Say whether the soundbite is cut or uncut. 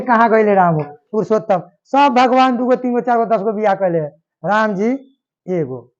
cut